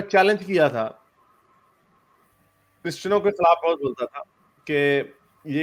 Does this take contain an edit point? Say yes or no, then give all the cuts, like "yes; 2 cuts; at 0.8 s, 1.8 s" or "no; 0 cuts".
no; 0 cuts